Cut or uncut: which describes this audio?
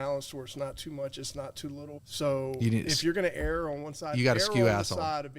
cut